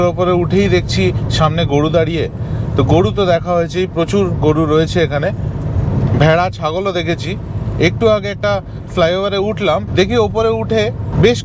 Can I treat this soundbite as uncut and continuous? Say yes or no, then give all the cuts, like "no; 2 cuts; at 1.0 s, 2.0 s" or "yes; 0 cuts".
yes; 0 cuts